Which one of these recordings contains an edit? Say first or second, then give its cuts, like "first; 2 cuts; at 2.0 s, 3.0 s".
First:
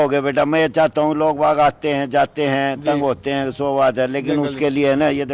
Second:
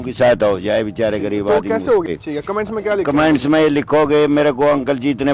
second; 1 cut; at 2.1 s